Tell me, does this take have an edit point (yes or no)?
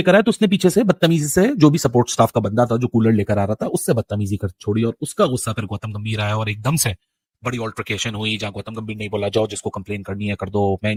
no